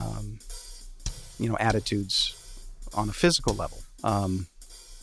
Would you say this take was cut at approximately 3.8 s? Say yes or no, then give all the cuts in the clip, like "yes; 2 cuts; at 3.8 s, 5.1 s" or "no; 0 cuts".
yes; 1 cut; at 3.8 s